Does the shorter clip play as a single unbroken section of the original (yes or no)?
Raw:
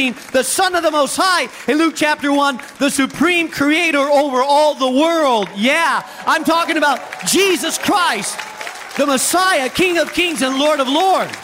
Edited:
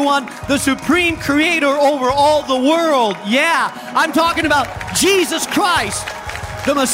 yes